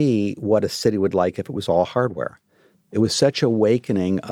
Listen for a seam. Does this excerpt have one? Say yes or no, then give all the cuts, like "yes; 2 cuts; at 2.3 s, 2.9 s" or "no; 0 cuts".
yes; 1 cut; at 2.8 s